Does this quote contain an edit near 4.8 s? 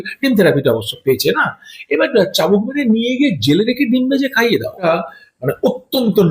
yes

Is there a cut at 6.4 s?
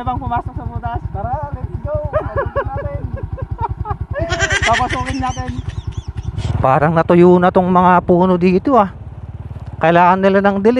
yes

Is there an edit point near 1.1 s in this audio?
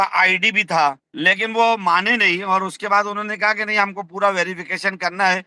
yes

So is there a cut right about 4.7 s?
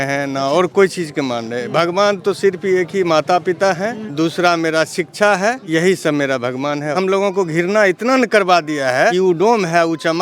no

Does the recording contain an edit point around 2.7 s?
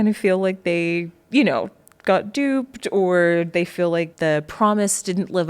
no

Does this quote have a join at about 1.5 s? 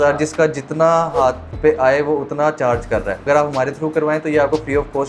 yes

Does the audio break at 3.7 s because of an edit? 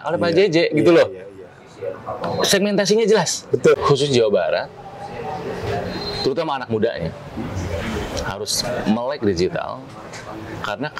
yes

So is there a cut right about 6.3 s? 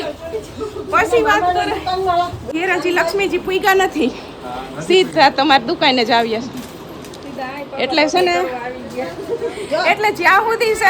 no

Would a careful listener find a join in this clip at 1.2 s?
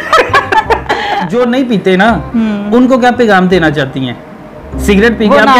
yes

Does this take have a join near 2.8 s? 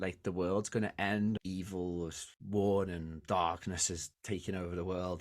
no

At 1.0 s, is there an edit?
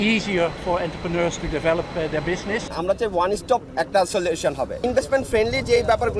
no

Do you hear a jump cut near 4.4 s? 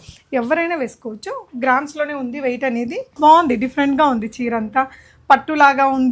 no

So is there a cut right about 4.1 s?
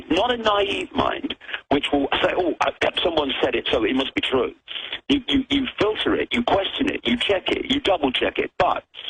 yes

